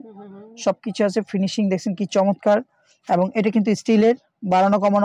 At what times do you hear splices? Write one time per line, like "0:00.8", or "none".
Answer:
none